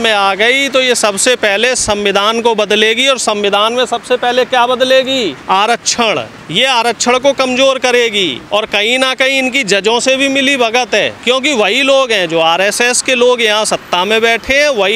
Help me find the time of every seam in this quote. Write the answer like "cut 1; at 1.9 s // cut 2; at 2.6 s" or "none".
cut 1; at 5.4 s // cut 2; at 6.4 s // cut 3; at 8.4 s // cut 4; at 11.2 s